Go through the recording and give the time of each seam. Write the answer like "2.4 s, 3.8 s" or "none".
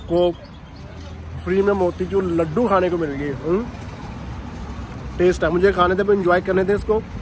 none